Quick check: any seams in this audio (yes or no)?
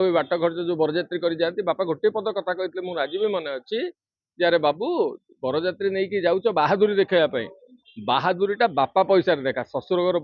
no